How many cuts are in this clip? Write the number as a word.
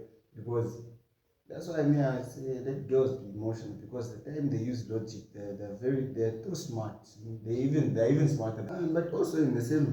one